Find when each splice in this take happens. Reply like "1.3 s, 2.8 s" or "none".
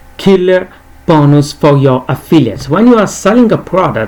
none